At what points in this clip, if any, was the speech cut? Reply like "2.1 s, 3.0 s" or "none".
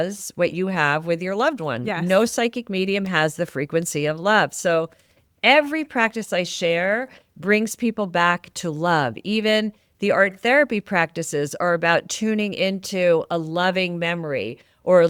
none